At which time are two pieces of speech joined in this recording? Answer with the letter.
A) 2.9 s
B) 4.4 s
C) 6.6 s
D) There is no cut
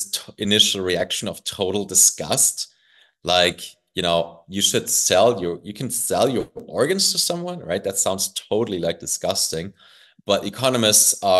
D